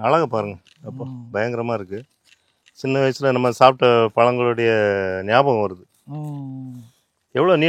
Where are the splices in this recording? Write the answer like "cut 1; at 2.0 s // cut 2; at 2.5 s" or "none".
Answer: none

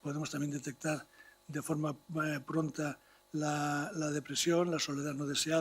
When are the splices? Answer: none

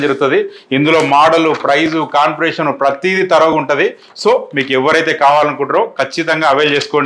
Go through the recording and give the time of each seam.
none

